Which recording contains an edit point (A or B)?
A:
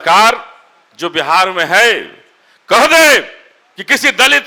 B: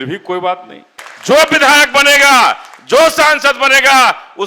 B